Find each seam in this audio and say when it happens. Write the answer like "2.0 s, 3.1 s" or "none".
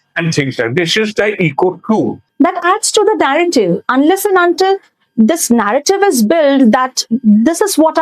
2.2 s